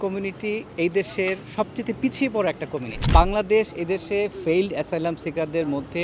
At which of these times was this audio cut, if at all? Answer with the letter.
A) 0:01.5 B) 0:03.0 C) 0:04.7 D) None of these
B